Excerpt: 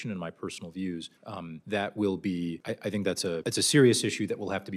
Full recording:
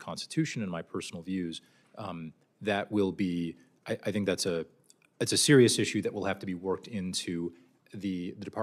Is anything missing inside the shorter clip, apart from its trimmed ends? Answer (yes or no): yes